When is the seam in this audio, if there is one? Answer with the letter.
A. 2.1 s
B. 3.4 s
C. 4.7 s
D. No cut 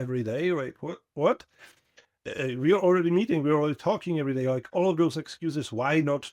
A